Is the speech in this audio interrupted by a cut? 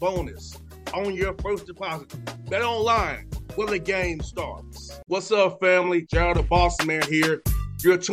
no; 0 cuts

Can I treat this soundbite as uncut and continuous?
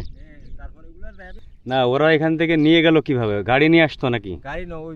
no; 1 cut; at 1.4 s

